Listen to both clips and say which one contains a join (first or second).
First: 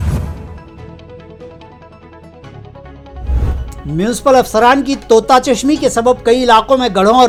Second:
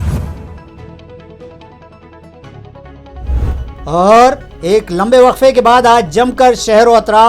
second